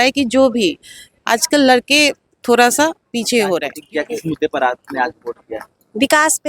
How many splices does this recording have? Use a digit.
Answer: 1